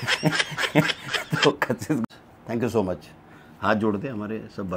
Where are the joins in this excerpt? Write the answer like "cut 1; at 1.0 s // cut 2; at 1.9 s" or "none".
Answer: cut 1; at 2.0 s